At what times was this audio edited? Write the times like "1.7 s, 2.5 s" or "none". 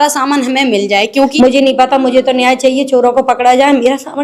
1.3 s